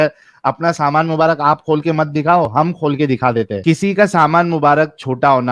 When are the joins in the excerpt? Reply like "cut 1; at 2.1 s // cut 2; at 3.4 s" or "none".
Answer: cut 1; at 3.6 s